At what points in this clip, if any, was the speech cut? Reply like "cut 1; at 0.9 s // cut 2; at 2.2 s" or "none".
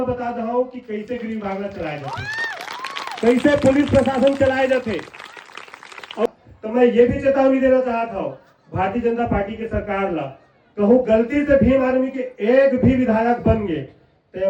cut 1; at 6.3 s

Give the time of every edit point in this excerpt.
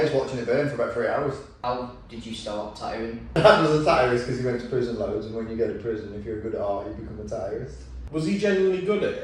cut 1; at 1.6 s // cut 2; at 3.4 s // cut 3; at 7.9 s

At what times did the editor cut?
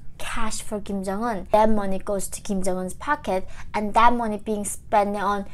cut 1; at 1.5 s

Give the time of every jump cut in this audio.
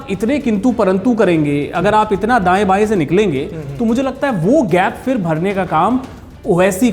none

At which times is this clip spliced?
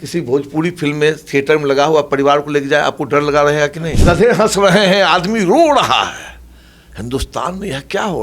cut 1; at 3.9 s

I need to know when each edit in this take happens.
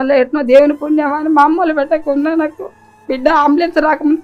none

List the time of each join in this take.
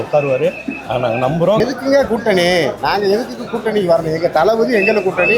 cut 1; at 1.6 s

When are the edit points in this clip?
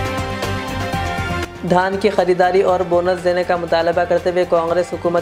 cut 1; at 1.4 s

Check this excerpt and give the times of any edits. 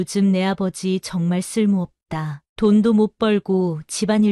none

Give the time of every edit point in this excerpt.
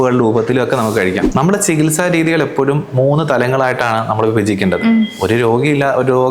cut 1; at 1.2 s

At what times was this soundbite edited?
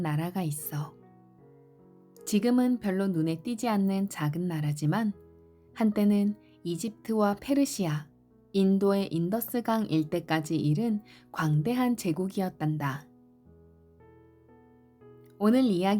none

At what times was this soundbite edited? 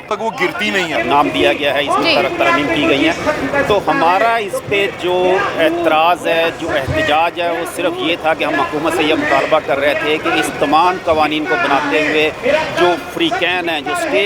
cut 1; at 1.0 s

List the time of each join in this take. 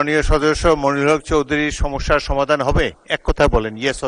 none

